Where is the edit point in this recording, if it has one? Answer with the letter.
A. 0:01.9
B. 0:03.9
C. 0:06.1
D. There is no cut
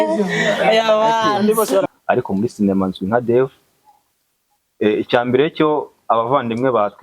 A